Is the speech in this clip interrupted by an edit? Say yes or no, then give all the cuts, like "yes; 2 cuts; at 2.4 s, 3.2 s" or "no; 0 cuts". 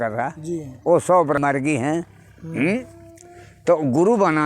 yes; 1 cut; at 1.4 s